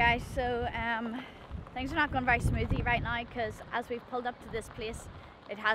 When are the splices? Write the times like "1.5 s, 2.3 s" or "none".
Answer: none